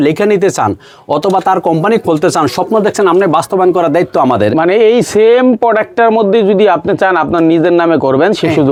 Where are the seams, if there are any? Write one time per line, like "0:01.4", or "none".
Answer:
none